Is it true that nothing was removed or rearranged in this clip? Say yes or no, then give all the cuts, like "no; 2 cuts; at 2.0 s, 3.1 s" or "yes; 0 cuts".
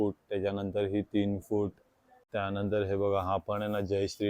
no; 1 cut; at 2.3 s